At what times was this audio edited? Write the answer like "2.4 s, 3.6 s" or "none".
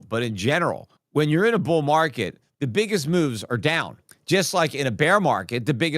0.9 s

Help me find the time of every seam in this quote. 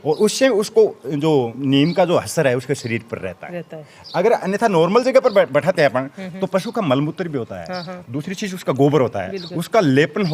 none

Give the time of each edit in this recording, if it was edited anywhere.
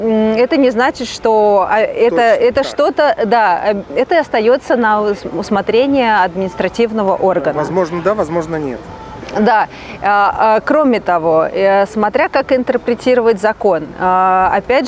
none

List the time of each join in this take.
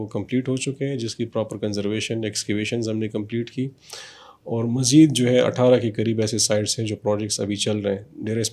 none

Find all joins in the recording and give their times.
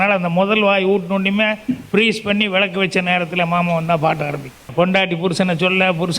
4.6 s

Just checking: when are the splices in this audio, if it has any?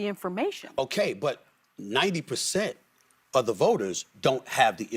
none

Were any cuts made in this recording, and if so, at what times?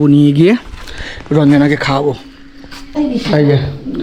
3.0 s

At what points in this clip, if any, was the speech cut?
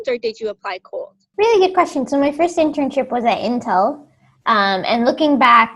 none

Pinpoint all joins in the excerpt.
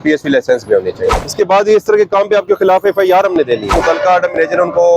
1.2 s, 3.7 s

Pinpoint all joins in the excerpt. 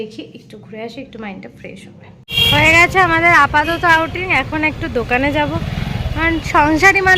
2.1 s

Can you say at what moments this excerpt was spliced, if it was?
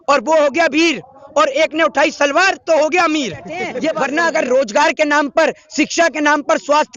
3.9 s

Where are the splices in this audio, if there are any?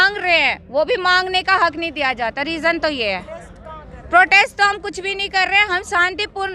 none

